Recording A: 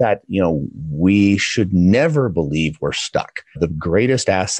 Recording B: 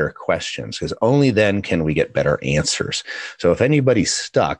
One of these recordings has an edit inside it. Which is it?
A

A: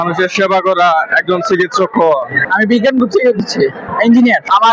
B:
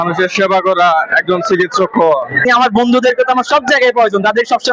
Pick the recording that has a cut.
B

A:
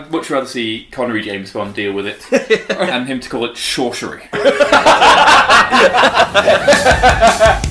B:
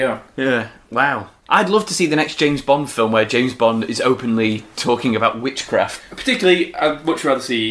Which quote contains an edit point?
B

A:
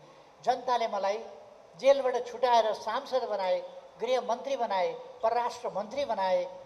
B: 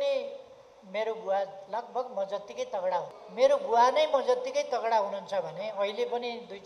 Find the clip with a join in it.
B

